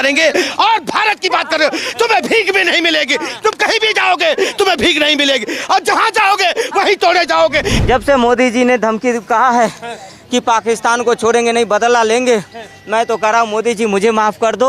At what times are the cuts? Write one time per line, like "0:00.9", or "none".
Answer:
0:07.7